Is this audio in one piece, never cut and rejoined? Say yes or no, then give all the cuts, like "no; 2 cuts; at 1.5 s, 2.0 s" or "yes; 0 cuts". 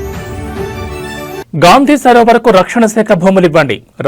no; 1 cut; at 1.2 s